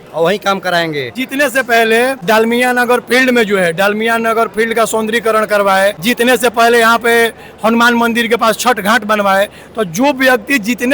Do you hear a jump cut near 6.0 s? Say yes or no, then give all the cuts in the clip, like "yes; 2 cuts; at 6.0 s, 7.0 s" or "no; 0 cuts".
yes; 3 cuts; at 1.1 s, 2.2 s, 6.0 s